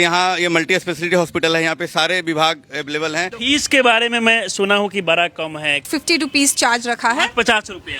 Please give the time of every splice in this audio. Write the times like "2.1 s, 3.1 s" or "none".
3.3 s, 5.9 s